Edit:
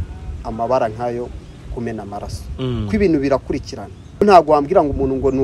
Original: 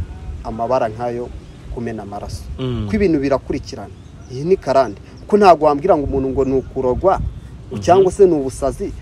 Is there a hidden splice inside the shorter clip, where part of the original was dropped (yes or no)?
yes